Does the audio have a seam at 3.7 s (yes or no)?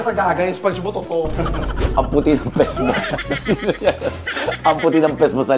no